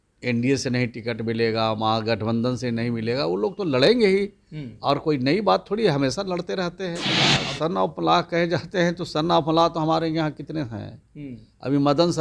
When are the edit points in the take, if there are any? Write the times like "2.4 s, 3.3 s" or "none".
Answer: 7.2 s